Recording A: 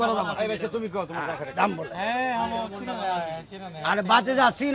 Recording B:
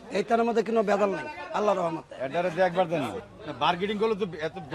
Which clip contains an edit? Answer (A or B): B